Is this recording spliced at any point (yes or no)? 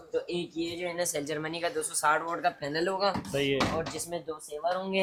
no